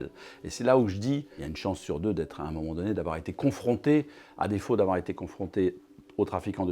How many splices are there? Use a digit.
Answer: 1